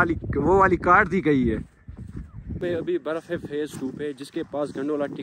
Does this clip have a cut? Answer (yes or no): yes